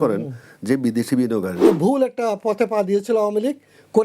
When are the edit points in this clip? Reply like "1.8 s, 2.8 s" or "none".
1.7 s